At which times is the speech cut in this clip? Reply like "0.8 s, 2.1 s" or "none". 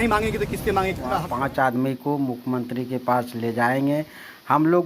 1.3 s